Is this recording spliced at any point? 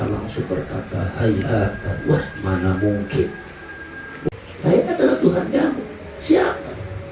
yes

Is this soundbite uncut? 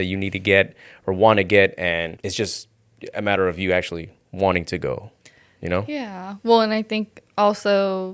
no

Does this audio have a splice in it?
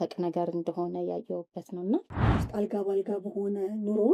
yes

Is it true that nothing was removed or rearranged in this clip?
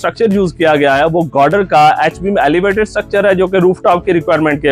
yes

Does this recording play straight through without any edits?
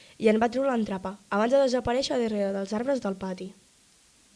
yes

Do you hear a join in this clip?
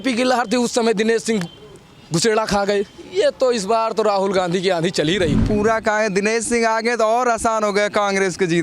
yes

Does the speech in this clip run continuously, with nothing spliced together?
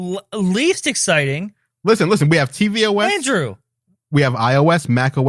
yes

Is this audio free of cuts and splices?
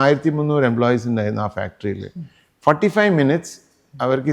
yes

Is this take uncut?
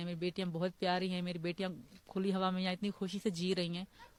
yes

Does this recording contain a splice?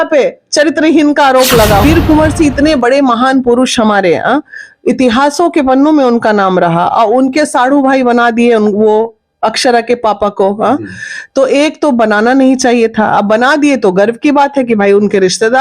yes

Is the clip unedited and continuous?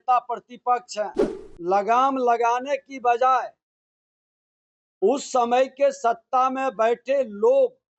no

